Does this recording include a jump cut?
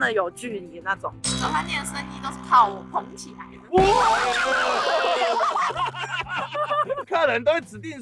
no; 0 cuts

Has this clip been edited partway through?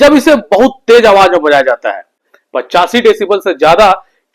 yes; 1 cut; at 2.2 s

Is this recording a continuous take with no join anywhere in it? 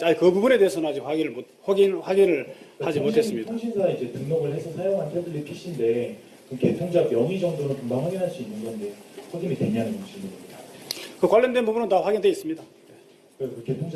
no; 1 cut; at 4.0 s

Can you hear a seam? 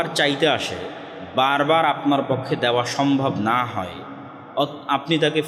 no; 0 cuts

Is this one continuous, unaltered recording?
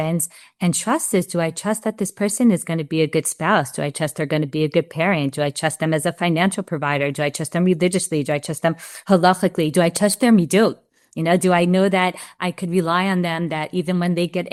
yes; 0 cuts

